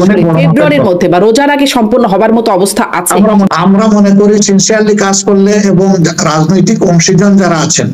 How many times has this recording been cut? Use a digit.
1